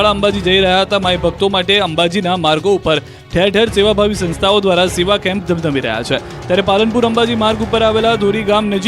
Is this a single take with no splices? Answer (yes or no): yes